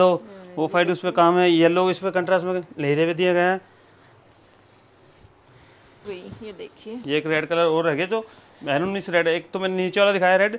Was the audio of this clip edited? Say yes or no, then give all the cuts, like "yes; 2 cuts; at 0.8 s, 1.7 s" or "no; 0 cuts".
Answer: yes; 1 cut; at 6.1 s